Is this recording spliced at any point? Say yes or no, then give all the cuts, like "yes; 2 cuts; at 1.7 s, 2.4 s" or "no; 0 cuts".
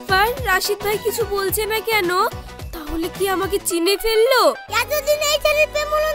yes; 1 cut; at 4.7 s